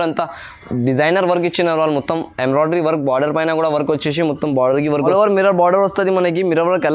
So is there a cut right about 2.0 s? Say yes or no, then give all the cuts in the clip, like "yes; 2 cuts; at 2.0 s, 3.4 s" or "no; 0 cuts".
no; 1 cut; at 5.1 s